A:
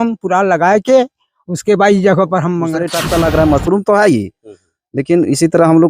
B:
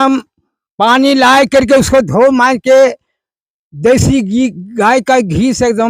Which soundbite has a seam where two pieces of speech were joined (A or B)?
A